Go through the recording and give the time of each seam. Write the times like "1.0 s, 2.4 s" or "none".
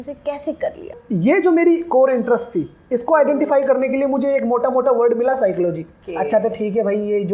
1.0 s, 6.0 s